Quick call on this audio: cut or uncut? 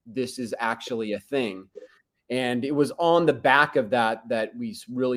uncut